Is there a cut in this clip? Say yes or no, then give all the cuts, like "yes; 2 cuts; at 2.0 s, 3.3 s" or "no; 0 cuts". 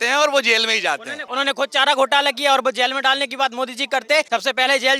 yes; 2 cuts; at 1.2 s, 4.3 s